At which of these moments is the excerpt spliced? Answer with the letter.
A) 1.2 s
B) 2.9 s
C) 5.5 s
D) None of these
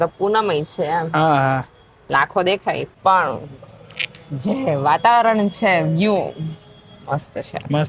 B